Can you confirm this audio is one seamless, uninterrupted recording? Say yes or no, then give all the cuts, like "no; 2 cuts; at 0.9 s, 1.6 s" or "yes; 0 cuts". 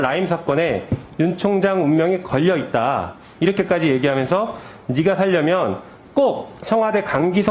yes; 0 cuts